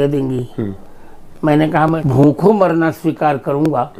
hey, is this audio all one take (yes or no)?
no